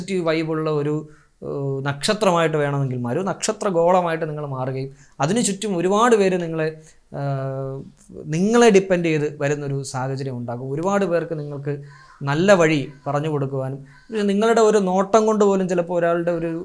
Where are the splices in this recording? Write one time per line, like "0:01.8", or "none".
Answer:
none